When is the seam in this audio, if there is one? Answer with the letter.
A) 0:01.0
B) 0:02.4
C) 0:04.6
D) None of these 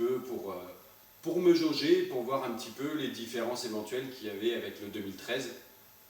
C